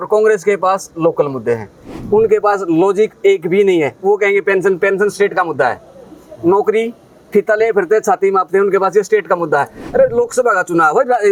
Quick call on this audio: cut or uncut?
uncut